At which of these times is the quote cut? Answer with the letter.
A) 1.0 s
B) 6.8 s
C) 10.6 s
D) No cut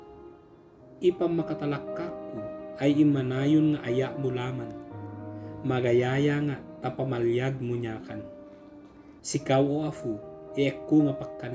A